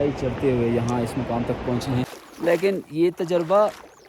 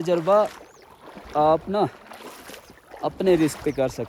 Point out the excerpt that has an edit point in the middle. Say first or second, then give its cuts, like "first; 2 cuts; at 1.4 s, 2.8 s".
first; 1 cut; at 2.2 s